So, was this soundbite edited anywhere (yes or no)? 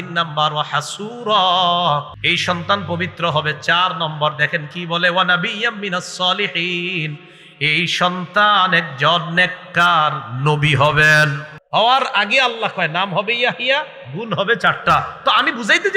yes